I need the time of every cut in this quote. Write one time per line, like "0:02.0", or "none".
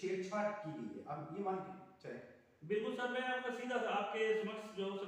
none